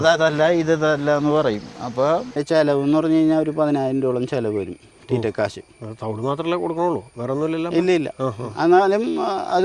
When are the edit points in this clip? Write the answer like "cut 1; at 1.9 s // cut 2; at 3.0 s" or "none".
cut 1; at 2.4 s